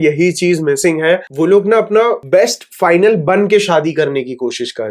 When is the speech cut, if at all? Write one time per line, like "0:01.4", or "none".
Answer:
0:01.3
0:02.2